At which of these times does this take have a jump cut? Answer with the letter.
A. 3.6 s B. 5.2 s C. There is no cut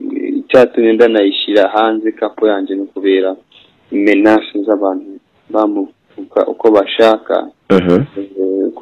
C